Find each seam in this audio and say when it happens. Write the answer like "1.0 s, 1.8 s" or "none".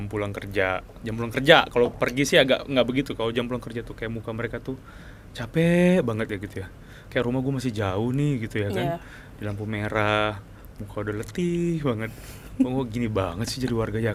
none